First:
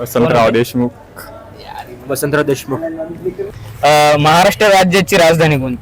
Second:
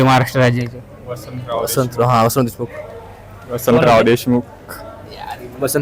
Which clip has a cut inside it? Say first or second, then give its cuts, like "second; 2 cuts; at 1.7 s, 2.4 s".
first; 1 cut; at 3.5 s